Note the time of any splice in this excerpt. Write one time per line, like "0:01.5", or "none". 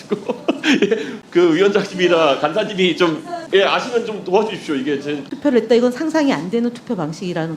0:01.1
0:03.3
0:05.3